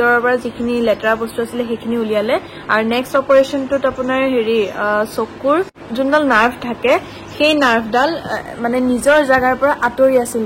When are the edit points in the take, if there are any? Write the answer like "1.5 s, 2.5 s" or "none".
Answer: none